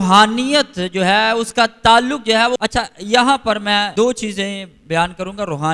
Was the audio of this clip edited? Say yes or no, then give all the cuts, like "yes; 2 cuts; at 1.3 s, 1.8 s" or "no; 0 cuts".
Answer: yes; 2 cuts; at 2.6 s, 3.9 s